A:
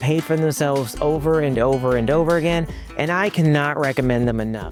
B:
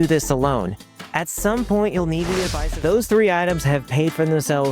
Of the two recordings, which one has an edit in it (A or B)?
B